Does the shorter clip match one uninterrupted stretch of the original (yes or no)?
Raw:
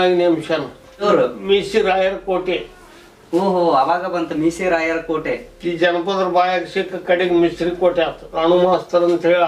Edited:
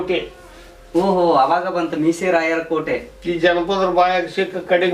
yes